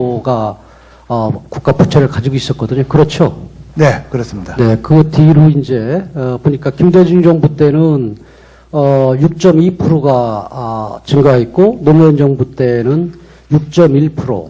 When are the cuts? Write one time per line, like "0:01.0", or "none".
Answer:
0:02.6